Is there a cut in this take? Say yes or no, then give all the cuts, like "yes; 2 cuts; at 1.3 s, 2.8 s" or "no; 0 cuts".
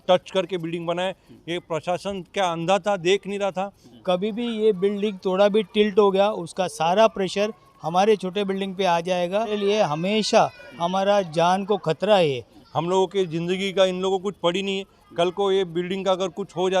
yes; 3 cuts; at 3.9 s, 9.5 s, 12.5 s